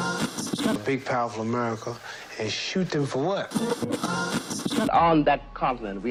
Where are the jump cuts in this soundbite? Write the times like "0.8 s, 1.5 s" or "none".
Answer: none